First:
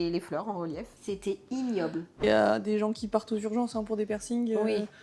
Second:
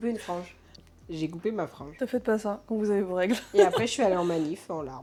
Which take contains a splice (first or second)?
first